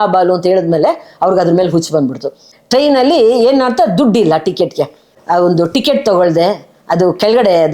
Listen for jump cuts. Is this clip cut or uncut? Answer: cut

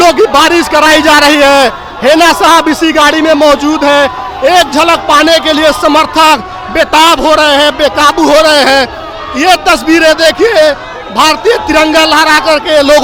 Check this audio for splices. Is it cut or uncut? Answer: uncut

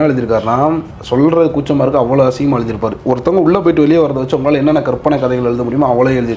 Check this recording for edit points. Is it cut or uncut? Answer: cut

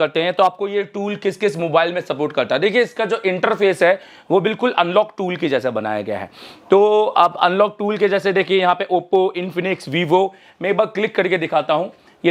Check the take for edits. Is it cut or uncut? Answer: uncut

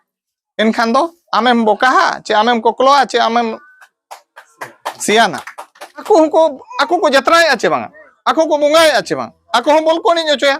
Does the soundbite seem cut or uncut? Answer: cut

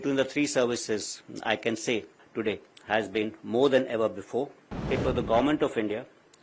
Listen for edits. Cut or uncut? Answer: cut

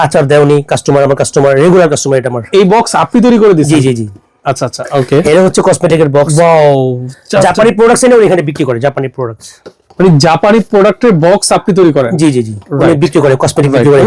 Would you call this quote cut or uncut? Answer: uncut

